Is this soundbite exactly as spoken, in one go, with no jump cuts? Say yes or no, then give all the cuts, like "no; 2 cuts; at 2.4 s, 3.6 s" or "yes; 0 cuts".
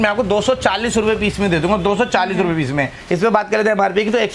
no; 1 cut; at 3.0 s